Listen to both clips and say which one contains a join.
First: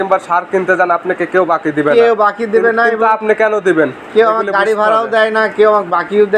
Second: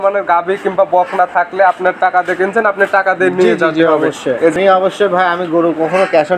second; 1 cut; at 4.5 s

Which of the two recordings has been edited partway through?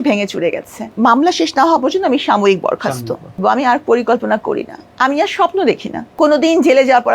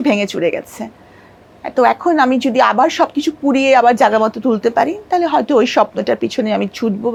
first; 3 cuts; at 0.9 s, 3.4 s, 6.0 s

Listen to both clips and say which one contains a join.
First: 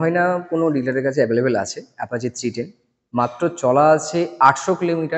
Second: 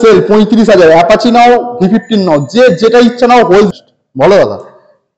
second; 1 cut; at 3.7 s

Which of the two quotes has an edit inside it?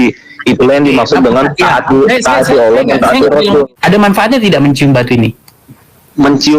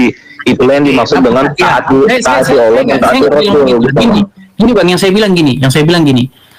first; 1 cut; at 3.7 s

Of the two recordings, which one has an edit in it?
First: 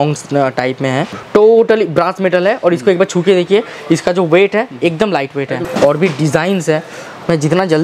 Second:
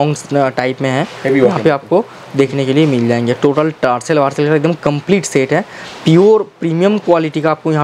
first; 2 cuts; at 1.1 s, 5.6 s

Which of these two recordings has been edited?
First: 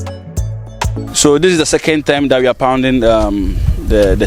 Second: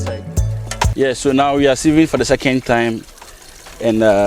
second; 1 cut; at 0.9 s

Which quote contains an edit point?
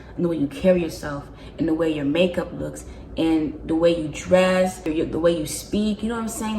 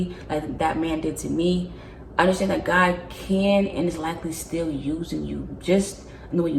first; 1 cut; at 4.9 s

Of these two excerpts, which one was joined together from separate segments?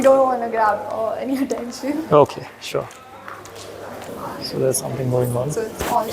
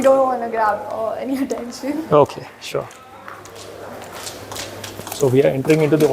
first; 1 cut; at 4.1 s

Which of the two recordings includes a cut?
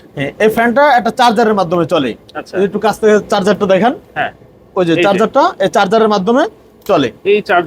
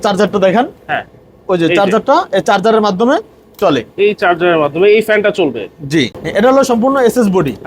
second; 1 cut; at 6.2 s

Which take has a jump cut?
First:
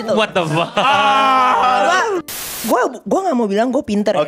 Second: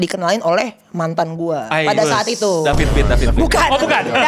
first; 1 cut; at 2.6 s

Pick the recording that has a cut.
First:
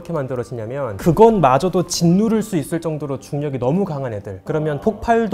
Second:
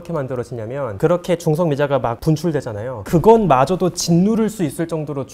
first; 1 cut; at 0.9 s

